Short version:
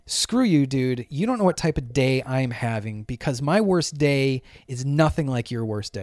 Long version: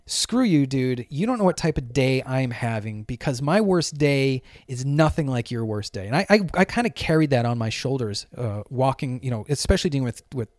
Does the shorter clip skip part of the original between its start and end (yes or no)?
no